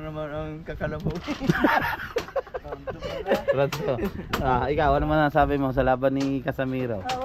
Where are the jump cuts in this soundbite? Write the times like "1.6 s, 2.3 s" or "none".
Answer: none